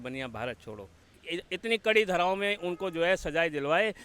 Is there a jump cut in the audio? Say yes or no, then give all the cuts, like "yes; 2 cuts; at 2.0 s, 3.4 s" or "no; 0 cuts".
yes; 1 cut; at 1.1 s